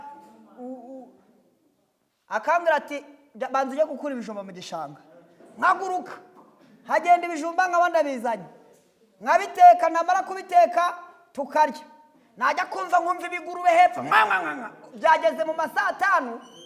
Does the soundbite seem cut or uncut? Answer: uncut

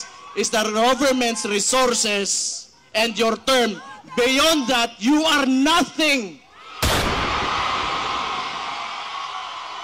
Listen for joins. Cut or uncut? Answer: uncut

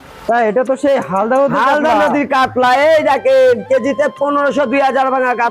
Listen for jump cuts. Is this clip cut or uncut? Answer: uncut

